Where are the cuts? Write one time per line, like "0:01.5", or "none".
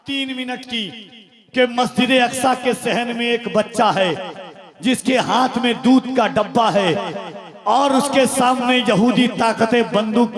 none